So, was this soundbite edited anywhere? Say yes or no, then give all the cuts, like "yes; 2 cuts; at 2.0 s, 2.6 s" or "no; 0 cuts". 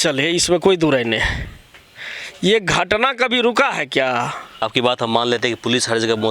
yes; 1 cut; at 4.6 s